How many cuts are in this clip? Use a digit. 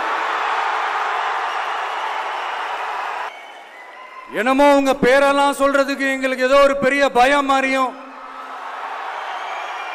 1